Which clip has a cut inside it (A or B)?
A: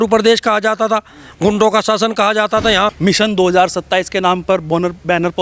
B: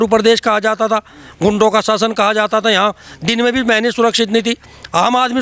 A